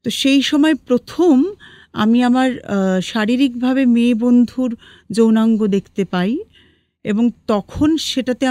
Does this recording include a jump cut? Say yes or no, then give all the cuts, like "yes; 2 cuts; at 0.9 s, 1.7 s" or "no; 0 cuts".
no; 0 cuts